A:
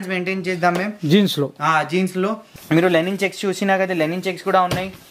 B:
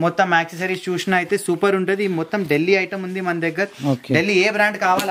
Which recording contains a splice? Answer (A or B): A